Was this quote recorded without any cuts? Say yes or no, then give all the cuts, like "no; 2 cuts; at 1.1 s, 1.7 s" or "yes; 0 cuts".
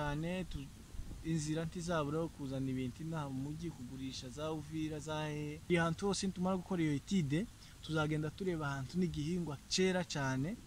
no; 1 cut; at 5.6 s